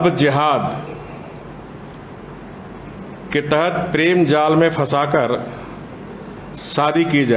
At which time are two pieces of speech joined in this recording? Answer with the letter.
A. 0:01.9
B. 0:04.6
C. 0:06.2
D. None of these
D